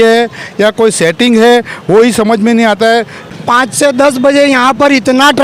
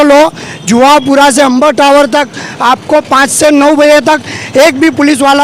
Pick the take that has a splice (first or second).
first